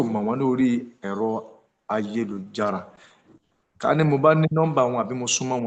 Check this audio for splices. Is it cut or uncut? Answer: uncut